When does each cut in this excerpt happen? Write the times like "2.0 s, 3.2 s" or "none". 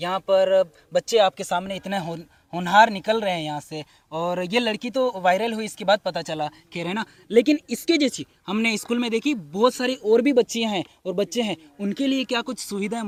none